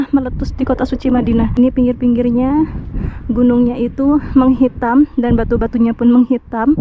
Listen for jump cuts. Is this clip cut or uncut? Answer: cut